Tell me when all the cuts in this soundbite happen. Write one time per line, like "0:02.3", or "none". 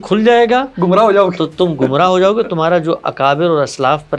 none